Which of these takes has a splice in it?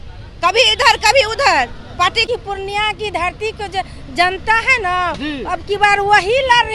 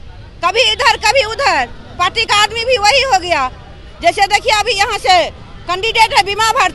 first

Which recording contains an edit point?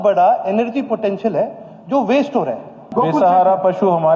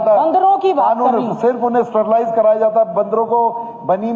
first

